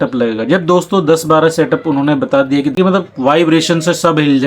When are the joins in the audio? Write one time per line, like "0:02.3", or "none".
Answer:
0:02.8